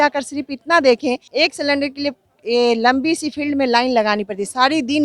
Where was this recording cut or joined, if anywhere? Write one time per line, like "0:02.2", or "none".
0:01.2